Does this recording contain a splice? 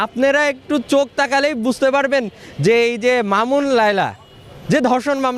no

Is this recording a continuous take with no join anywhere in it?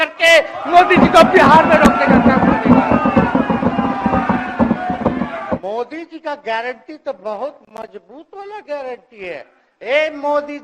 no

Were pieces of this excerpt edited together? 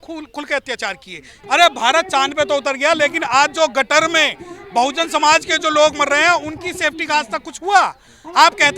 yes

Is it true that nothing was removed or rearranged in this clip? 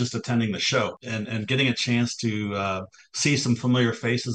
no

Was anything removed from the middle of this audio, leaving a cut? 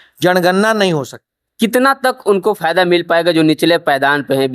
yes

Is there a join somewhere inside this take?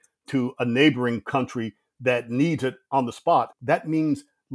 yes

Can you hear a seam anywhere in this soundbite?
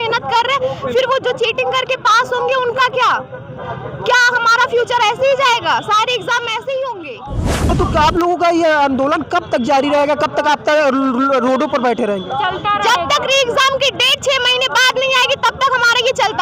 yes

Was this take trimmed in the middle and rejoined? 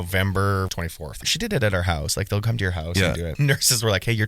yes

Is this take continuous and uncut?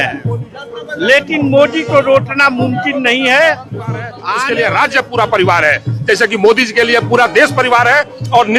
no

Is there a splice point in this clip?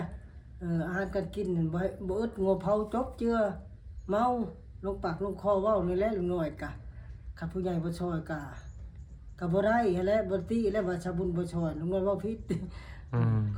no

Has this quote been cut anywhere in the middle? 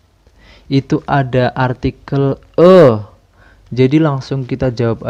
no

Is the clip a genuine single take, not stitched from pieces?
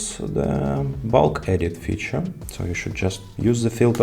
no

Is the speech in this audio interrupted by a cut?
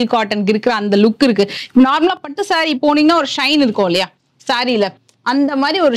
no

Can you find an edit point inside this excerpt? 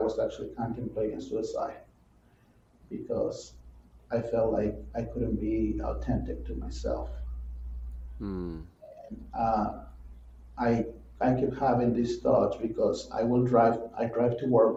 no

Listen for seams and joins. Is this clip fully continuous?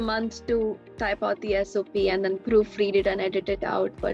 yes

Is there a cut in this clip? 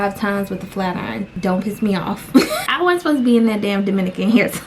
yes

